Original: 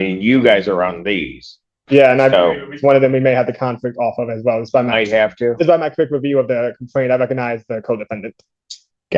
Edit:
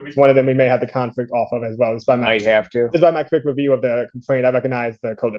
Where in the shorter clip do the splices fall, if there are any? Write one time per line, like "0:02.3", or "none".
none